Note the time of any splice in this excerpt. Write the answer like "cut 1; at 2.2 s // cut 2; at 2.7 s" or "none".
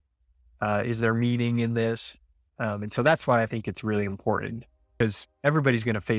cut 1; at 4.9 s